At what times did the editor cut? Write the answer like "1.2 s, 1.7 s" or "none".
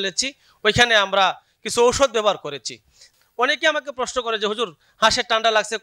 3.0 s